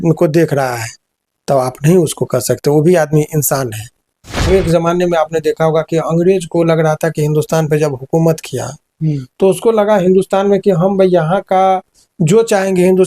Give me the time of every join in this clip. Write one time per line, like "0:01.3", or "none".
0:04.5